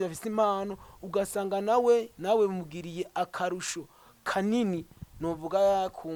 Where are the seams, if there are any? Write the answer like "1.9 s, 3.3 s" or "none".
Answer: none